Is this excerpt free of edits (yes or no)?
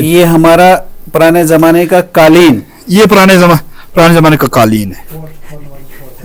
yes